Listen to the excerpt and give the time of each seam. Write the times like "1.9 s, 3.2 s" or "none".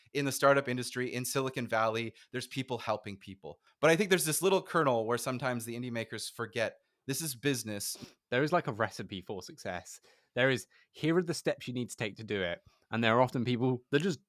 3.6 s, 7.9 s